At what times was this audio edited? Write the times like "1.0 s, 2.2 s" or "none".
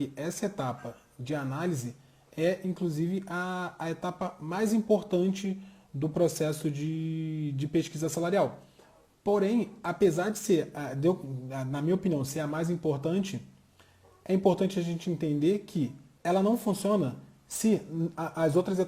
none